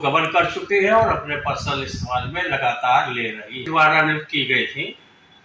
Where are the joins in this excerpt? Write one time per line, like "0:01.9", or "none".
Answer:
0:03.7